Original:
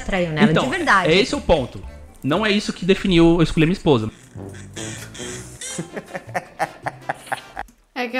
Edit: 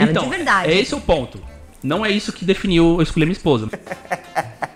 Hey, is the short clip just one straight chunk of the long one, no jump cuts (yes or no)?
no